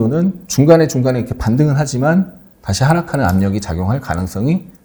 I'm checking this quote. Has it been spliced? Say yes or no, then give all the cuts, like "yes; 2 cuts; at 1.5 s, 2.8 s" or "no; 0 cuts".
no; 0 cuts